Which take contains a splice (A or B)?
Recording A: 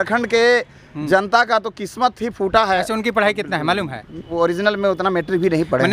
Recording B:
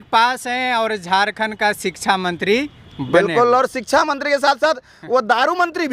A